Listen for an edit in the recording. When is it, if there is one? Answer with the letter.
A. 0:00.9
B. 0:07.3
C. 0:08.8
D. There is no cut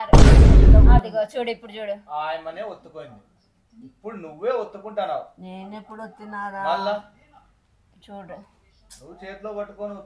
A